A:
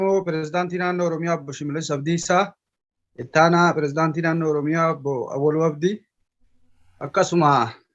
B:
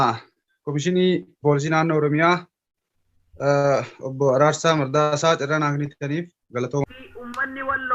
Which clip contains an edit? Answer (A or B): B